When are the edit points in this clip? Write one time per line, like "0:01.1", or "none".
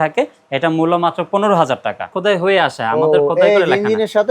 0:02.1